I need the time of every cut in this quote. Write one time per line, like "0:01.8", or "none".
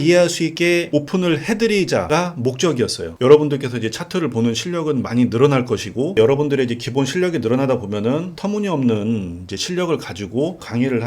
0:00.8
0:02.1
0:03.1